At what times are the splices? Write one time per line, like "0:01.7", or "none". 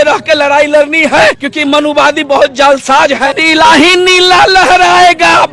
0:01.5
0:03.4